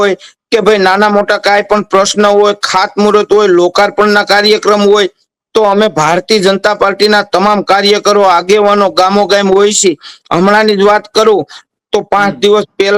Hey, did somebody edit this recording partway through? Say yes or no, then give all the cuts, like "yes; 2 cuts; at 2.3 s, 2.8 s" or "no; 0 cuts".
no; 0 cuts